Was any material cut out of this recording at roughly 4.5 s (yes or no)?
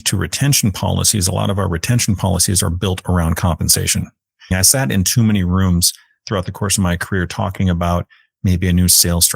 yes